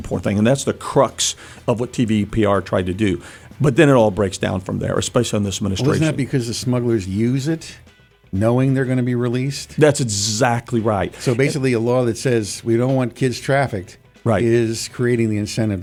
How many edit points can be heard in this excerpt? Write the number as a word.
zero